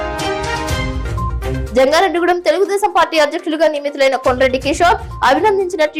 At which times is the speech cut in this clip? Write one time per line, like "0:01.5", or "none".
none